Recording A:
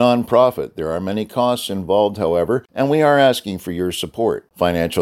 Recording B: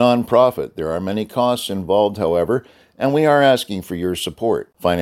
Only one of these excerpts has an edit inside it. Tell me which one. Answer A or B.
A